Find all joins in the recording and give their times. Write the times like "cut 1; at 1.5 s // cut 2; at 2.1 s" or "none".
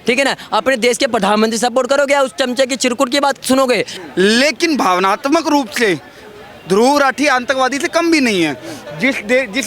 cut 1; at 3.9 s